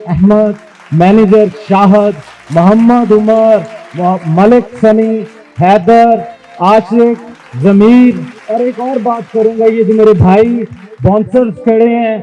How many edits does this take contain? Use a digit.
1